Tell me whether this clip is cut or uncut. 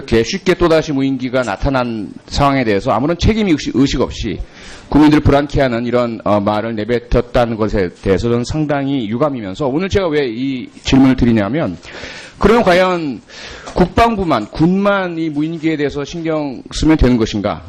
cut